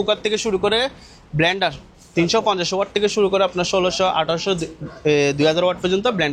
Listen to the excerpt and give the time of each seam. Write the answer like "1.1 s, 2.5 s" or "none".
none